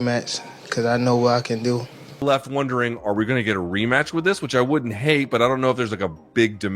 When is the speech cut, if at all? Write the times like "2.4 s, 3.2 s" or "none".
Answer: 2.2 s